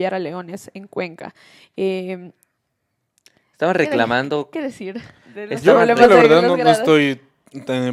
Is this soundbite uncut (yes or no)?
yes